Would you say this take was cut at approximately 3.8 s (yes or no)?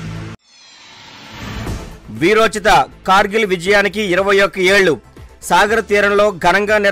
no